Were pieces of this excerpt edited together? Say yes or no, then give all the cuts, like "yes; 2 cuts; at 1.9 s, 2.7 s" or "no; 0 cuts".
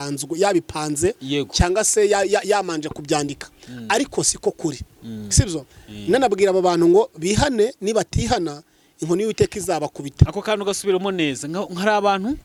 no; 0 cuts